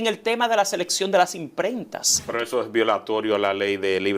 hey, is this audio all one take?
no; 1 cut; at 2.3 s

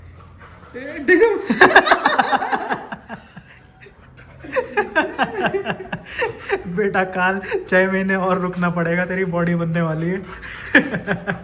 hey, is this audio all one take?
yes; 0 cuts

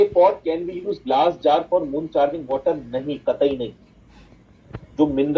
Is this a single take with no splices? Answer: yes; 0 cuts

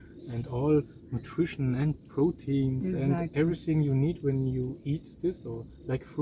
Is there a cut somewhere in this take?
no; 0 cuts

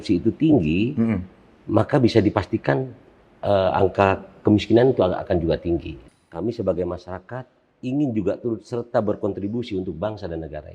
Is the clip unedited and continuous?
no; 1 cut; at 6.0 s

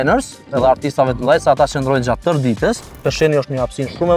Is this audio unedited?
no; 1 cut; at 3.0 s

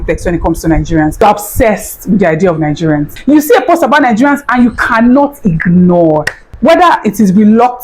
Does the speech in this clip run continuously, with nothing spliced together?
no; 3 cuts; at 1.2 s, 3.1 s, 6.4 s

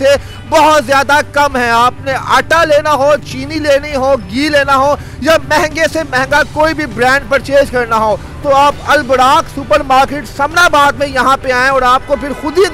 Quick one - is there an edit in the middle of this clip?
no; 0 cuts

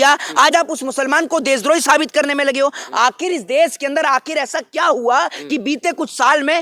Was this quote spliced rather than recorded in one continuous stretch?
no; 0 cuts

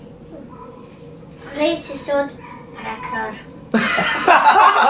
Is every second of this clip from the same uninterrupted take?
yes; 0 cuts

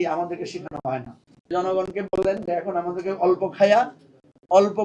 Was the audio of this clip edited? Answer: yes; 1 cut; at 1.5 s

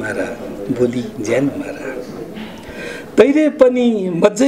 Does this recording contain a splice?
no; 0 cuts

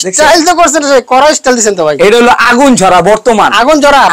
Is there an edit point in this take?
no; 0 cuts

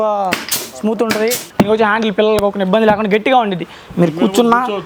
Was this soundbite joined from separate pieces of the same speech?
yes; 1 cut; at 1.4 s

